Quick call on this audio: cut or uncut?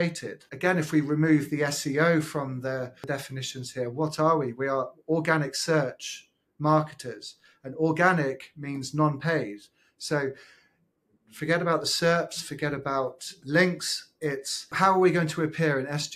cut